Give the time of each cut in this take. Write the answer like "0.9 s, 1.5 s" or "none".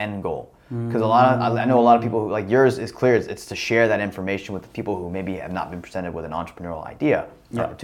none

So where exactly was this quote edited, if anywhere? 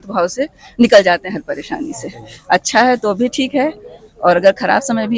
none

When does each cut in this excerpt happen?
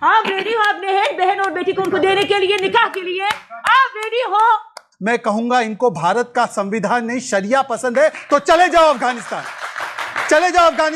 4.9 s

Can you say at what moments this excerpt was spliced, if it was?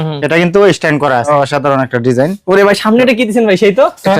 1.3 s

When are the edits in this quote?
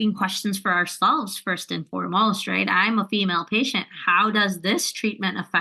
none

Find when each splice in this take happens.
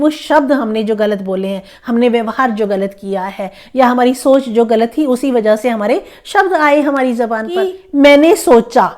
7.8 s

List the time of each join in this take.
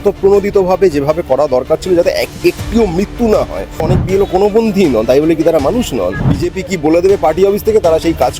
3.9 s, 6.3 s

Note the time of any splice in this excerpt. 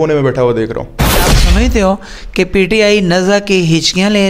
1.4 s

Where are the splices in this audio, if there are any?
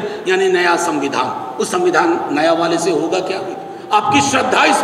3.7 s

